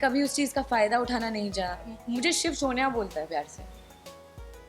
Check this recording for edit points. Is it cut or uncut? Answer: cut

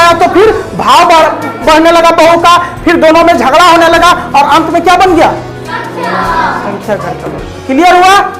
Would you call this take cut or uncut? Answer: uncut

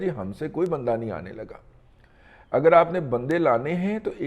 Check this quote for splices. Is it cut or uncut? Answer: uncut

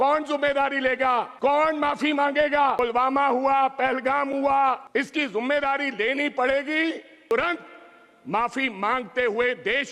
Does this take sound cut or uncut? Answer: cut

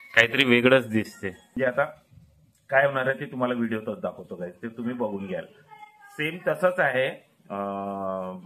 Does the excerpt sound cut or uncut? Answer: cut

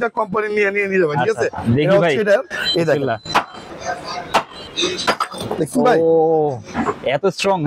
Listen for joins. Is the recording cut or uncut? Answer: cut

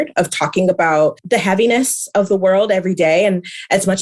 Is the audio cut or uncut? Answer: cut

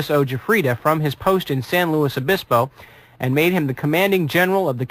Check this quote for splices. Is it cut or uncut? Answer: cut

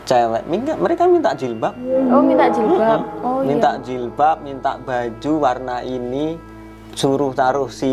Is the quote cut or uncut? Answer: uncut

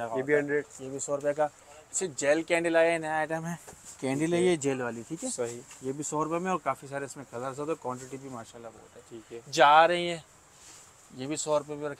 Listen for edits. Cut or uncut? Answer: uncut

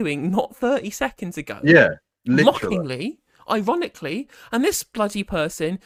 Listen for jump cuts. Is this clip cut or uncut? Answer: uncut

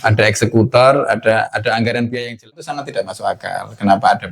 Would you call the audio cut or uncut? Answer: cut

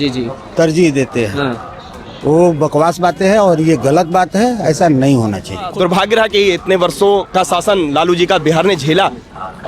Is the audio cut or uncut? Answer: cut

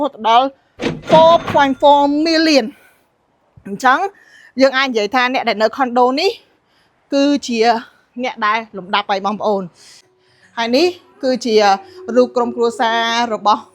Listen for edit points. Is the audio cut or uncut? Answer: cut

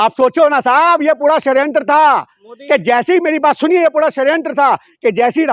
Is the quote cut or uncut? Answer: uncut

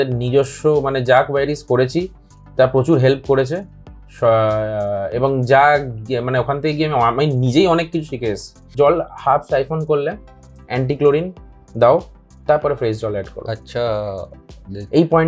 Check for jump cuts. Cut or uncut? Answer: cut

